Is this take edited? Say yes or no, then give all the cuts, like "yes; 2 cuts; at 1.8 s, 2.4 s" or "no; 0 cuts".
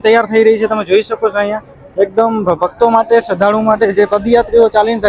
no; 0 cuts